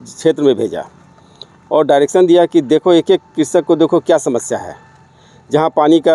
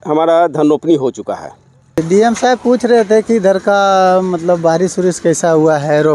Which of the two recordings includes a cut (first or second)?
second